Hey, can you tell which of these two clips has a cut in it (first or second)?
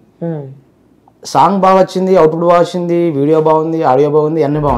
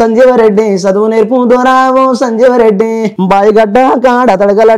second